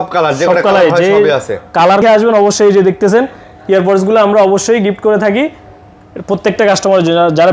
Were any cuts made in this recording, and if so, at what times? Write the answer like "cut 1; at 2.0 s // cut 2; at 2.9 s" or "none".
cut 1; at 2.0 s